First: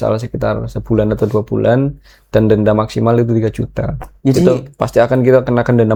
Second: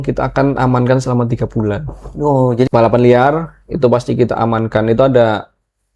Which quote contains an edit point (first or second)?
second